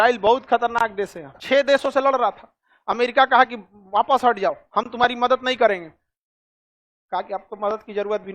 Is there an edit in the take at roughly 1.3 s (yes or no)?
yes